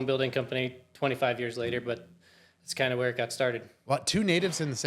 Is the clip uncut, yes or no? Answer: no